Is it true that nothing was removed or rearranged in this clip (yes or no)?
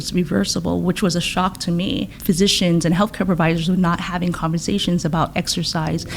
no